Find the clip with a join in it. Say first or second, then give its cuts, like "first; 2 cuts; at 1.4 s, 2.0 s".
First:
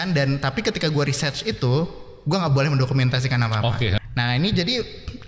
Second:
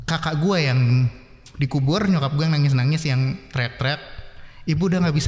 first; 1 cut; at 4.0 s